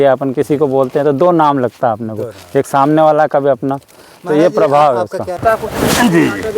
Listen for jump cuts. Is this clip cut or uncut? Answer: cut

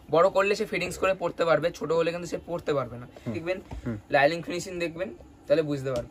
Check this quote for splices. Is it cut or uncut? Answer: cut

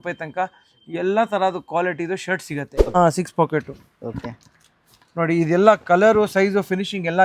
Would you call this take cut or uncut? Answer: cut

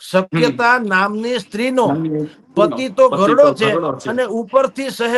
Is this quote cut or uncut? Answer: uncut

